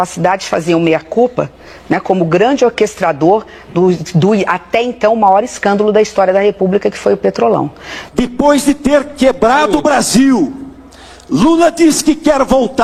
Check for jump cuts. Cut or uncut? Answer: uncut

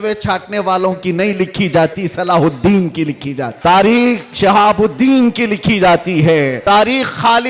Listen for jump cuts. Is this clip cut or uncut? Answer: cut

